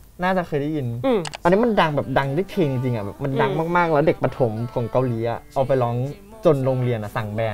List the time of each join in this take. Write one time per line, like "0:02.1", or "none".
0:01.3